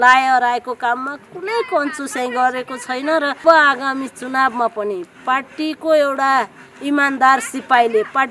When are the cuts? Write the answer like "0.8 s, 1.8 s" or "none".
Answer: 3.4 s